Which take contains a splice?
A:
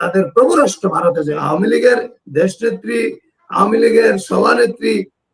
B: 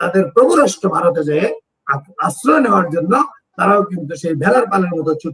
A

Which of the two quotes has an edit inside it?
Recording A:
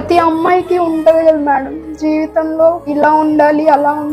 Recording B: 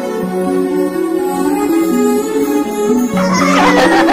A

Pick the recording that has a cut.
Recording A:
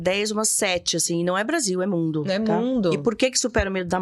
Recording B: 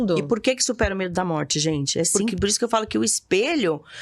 B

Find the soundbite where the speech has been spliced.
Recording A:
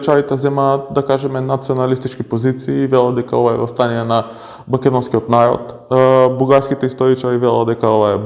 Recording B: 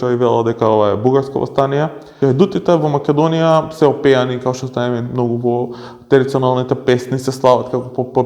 B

